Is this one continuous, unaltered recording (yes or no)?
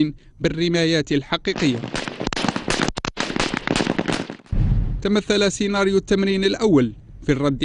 no